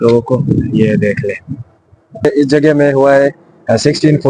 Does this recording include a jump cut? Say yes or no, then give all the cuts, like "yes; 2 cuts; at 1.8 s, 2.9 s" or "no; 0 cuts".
yes; 1 cut; at 2.2 s